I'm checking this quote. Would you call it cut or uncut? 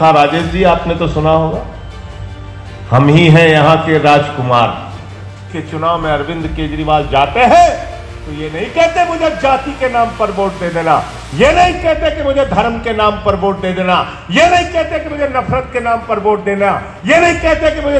cut